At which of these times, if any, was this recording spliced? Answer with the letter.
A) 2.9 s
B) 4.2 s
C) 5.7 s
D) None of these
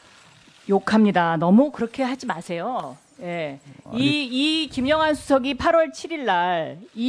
B